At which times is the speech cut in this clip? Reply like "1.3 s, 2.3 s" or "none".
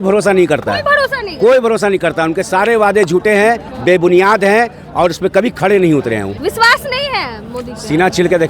6.3 s